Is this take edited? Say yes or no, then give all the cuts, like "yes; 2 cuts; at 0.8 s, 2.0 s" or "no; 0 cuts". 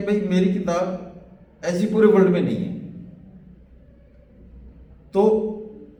no; 0 cuts